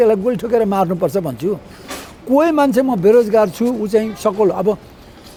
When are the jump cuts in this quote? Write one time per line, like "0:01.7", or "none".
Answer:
none